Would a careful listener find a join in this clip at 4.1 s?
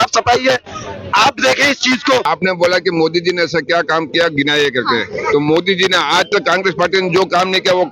no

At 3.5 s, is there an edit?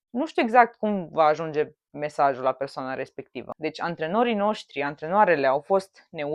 yes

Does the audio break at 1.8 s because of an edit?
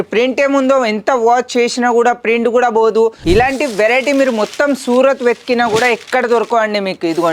no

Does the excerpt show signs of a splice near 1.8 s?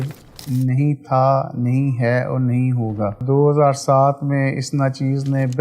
no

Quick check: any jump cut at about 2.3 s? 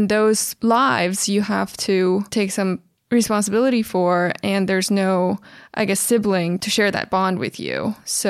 yes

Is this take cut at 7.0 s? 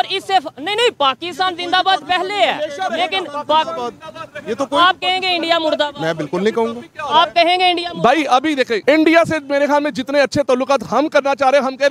no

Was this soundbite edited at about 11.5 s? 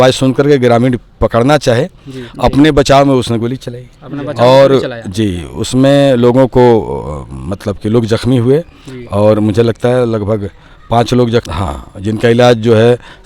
yes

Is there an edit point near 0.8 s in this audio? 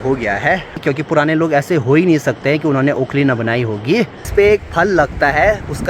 yes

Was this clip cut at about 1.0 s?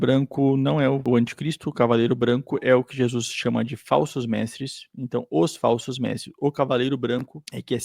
yes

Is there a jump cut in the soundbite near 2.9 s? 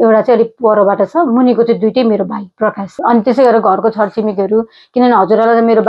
yes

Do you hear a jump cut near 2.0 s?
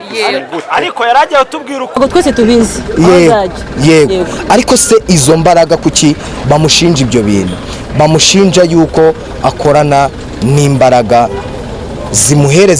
yes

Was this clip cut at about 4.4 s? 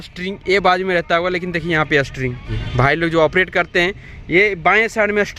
no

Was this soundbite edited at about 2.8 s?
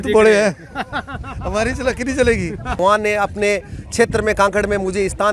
yes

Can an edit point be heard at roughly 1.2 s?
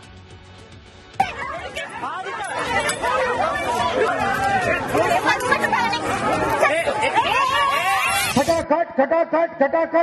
yes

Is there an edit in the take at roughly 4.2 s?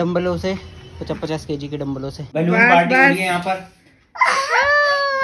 no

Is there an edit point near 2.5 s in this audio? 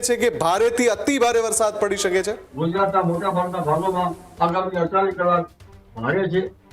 yes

